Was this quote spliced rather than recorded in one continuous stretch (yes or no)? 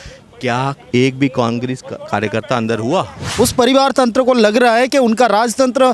yes